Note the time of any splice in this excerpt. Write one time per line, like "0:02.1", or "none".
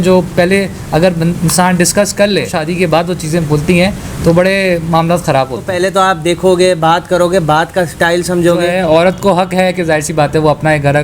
0:02.6
0:05.7
0:08.7